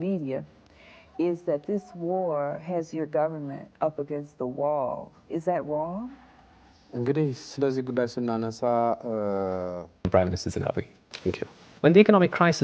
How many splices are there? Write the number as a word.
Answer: one